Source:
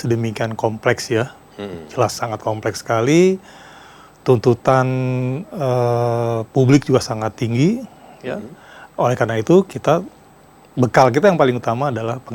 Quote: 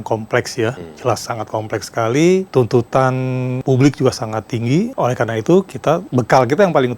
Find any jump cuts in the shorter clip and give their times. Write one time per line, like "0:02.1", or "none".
0:00.9
0:02.5
0:03.6
0:04.9
0:06.1